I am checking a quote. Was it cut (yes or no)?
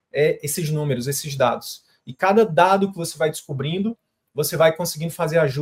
no